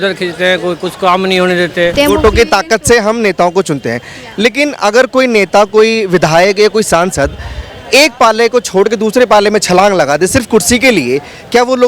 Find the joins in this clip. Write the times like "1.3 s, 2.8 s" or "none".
1.9 s